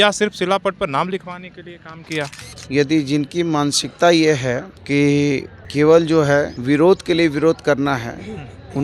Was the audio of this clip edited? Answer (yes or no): yes